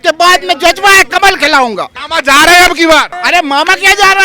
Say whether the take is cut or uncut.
cut